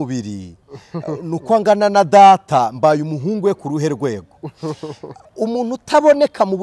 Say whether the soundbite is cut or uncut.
uncut